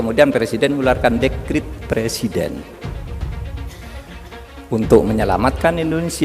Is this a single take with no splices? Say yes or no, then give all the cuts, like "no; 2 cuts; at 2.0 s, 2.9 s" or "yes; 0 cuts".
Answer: no; 2 cuts; at 2.7 s, 4.3 s